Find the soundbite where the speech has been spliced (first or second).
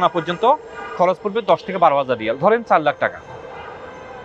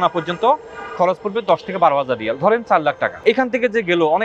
second